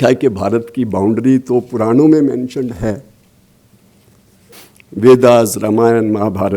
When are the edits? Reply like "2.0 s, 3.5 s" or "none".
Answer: 4.5 s